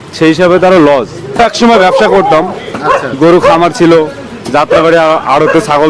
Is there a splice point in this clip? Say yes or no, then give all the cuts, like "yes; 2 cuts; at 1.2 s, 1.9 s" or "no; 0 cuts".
yes; 1 cut; at 1.4 s